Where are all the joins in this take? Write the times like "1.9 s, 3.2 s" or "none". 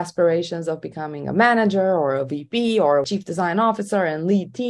3.1 s

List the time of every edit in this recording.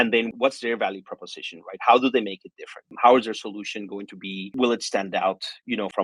none

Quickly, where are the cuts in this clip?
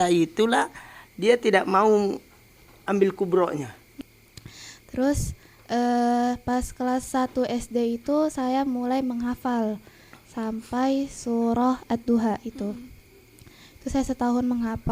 3.9 s

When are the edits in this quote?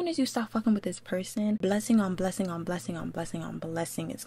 1.6 s

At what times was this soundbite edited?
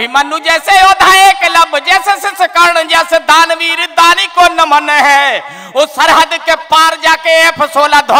none

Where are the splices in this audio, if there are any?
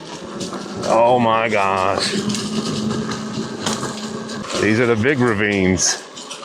4.4 s

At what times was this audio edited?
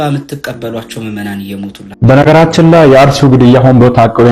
1.9 s

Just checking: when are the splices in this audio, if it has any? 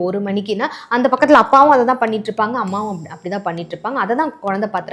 none

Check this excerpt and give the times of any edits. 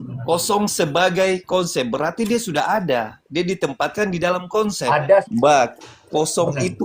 5.2 s

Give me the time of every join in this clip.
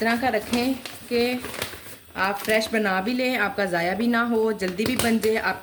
none

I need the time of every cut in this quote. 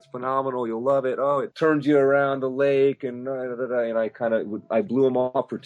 1.5 s

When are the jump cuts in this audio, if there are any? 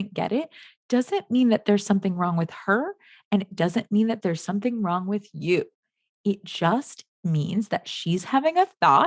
none

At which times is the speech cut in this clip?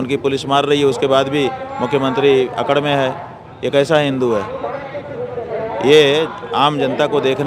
none

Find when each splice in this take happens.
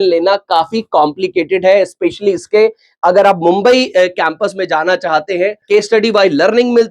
5.6 s

